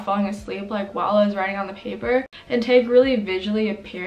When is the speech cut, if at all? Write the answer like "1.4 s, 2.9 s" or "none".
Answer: 2.4 s